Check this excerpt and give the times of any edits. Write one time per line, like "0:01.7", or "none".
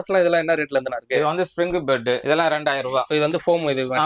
0:02.2
0:03.1